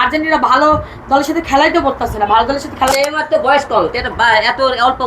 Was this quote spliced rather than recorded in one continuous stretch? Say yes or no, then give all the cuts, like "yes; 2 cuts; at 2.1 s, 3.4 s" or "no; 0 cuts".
yes; 1 cut; at 2.9 s